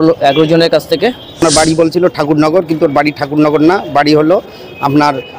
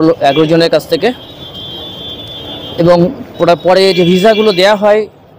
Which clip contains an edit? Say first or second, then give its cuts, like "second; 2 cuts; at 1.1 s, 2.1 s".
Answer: first; 1 cut; at 1.4 s